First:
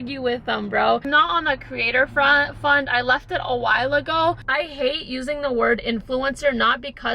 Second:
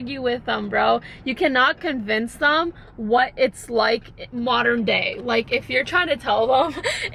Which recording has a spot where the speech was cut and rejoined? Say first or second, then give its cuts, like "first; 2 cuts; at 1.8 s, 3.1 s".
first; 2 cuts; at 1.1 s, 4.4 s